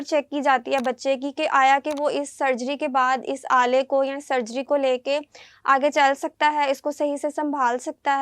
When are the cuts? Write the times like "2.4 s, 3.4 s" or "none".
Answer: none